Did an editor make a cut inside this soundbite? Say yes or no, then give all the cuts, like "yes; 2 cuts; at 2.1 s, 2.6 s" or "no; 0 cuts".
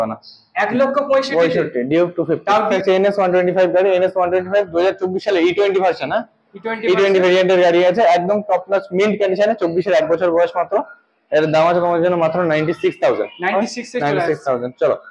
yes; 1 cut; at 2.7 s